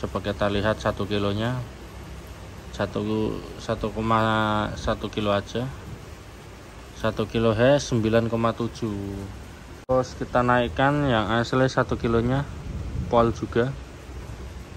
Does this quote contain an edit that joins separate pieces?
yes; 1 cut; at 9.9 s

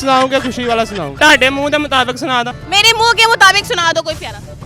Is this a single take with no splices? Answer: no; 2 cuts; at 1.2 s, 2.5 s

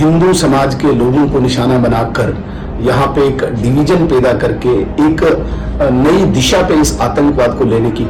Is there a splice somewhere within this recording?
no; 0 cuts

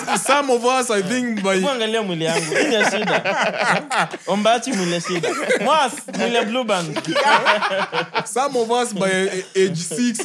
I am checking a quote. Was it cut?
no; 0 cuts

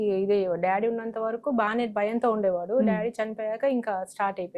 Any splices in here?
no; 0 cuts

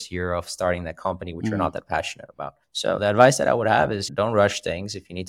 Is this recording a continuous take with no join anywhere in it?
yes; 0 cuts

